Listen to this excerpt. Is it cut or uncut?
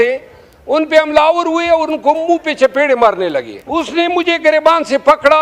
cut